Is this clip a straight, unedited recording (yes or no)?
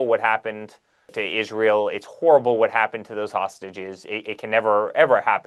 no